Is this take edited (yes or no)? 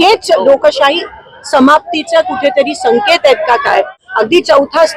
yes